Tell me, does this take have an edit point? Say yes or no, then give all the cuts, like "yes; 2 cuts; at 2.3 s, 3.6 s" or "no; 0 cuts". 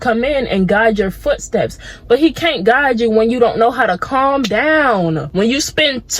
yes; 1 cut; at 5.2 s